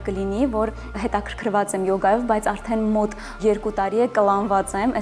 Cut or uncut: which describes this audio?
cut